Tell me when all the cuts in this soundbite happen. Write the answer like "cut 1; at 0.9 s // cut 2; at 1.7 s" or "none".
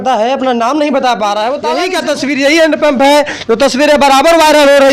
cut 1; at 1.9 s